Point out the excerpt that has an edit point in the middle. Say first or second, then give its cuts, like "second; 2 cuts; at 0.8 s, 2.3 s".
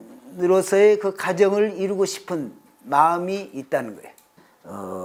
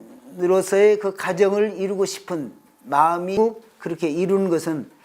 second; 1 cut; at 3.4 s